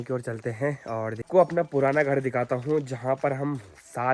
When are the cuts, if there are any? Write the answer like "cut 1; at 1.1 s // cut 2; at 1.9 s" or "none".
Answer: cut 1; at 1.2 s